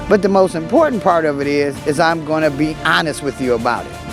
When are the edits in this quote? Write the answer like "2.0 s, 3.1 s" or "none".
none

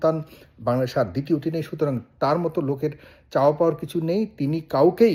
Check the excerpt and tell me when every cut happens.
none

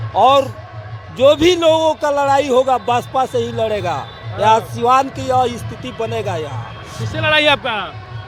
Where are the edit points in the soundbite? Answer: none

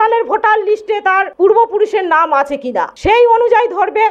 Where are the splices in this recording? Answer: none

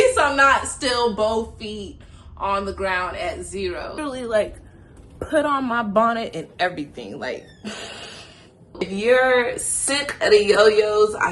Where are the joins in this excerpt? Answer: 4.0 s, 8.9 s

